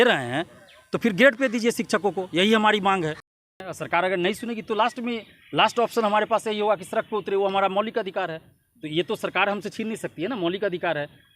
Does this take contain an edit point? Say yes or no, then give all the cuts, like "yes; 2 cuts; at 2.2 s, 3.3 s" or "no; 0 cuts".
yes; 1 cut; at 3.6 s